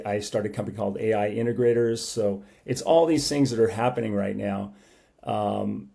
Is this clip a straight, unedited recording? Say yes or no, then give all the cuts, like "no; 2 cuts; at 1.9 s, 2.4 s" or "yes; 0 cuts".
yes; 0 cuts